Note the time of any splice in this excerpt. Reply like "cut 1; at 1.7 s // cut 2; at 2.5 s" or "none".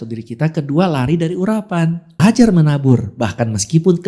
cut 1; at 2.2 s